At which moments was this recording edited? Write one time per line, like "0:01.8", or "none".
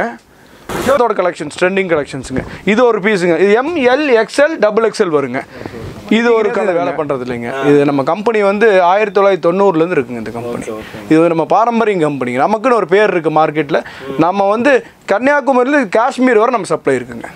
0:00.9
0:06.7